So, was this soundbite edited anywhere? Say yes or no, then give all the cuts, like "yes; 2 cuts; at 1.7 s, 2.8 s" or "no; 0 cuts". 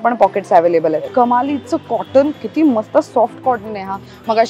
yes; 1 cut; at 1.1 s